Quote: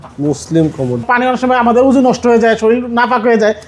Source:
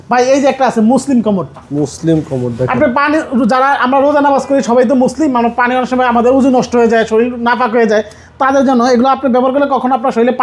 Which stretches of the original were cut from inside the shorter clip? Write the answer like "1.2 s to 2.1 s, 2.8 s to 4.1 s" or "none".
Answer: 2.6 s to 5.5 s